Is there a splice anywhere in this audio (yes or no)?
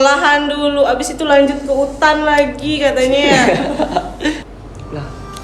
yes